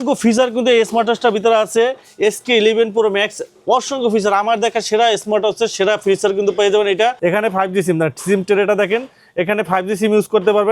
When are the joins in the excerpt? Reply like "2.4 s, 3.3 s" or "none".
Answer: 7.2 s

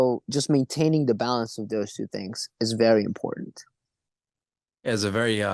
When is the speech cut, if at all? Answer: none

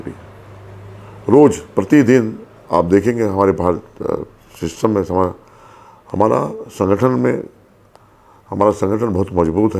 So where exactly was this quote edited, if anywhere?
none

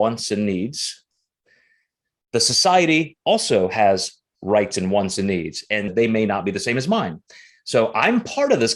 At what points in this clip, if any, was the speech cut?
5.9 s

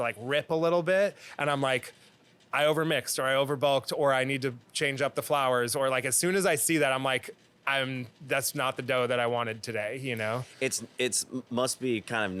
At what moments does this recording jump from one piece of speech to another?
none

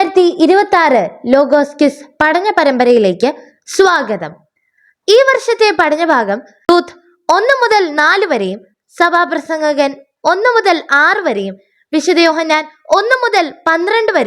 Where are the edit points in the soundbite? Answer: 6.7 s

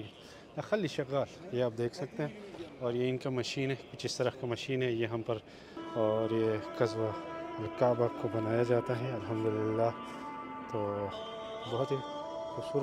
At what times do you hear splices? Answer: none

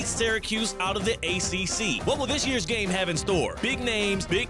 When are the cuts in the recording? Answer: none

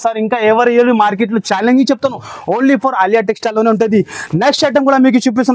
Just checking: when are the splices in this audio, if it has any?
none

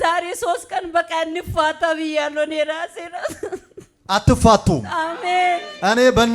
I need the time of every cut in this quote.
none

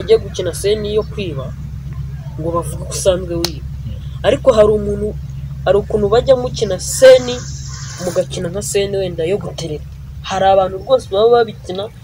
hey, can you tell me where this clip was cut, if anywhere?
none

